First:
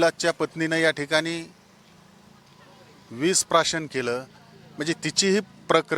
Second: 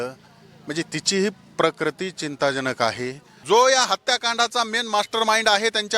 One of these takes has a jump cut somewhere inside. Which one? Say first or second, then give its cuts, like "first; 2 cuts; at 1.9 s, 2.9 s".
second; 1 cut; at 3.3 s